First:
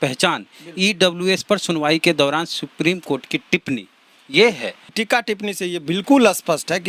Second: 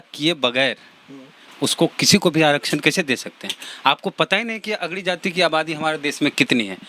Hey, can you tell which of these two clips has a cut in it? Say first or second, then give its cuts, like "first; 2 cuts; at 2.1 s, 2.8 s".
first; 1 cut; at 4.9 s